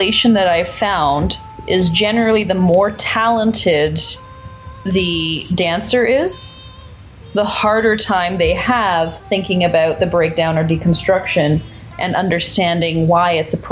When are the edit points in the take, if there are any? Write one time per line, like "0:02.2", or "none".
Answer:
none